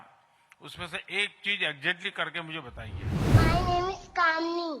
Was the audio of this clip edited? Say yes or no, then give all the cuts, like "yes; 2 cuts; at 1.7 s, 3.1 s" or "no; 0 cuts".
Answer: yes; 1 cut; at 3.3 s